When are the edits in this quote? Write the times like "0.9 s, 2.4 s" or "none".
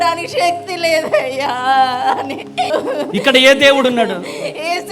2.7 s